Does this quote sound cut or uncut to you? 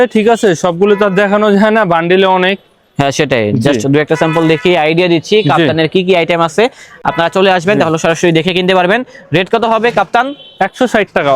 uncut